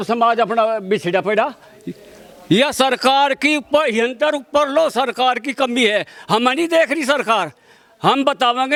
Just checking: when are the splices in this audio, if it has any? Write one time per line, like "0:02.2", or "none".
none